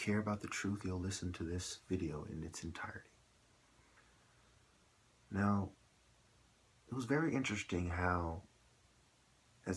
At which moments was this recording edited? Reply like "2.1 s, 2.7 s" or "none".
3.0 s